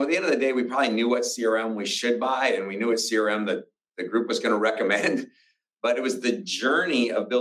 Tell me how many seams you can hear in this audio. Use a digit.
0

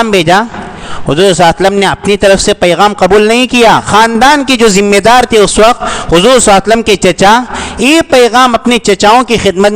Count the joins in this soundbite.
1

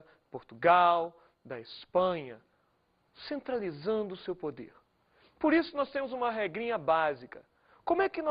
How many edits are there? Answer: 1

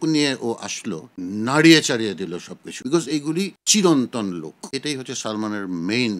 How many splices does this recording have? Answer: 1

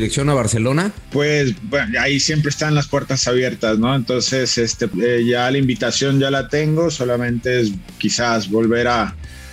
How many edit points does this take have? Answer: 2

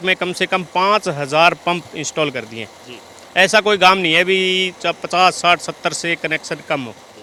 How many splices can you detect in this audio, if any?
0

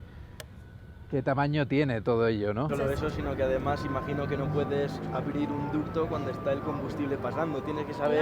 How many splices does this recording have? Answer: 1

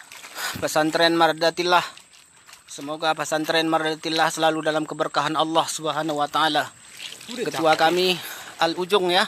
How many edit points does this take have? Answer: 1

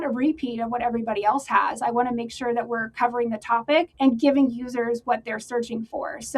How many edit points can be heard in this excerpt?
1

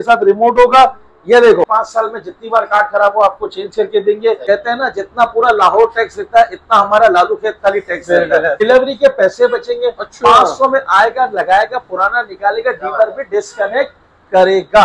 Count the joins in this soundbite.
3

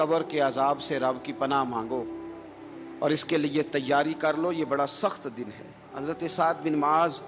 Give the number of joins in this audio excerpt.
1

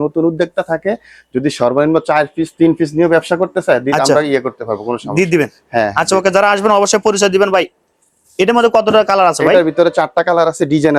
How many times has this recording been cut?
0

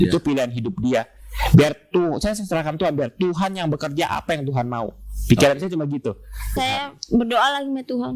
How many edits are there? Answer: 1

